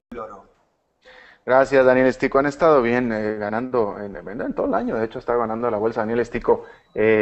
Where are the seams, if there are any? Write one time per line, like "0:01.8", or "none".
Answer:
none